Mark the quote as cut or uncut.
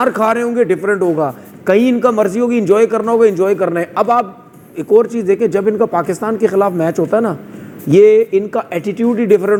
uncut